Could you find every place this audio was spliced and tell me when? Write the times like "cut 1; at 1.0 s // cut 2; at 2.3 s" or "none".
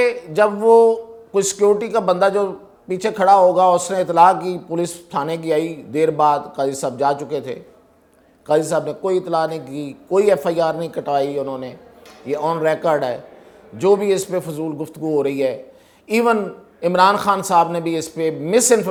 none